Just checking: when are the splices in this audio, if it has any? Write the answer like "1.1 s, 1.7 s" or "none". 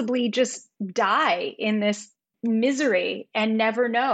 none